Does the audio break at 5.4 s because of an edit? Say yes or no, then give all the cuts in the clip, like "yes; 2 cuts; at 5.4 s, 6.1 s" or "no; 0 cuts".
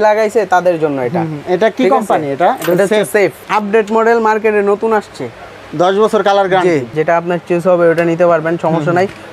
no; 2 cuts; at 3.4 s, 6.9 s